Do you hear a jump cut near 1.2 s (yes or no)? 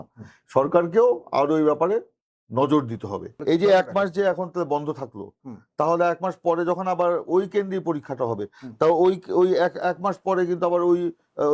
no